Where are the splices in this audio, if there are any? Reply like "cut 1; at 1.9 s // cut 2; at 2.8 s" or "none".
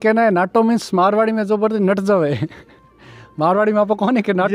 none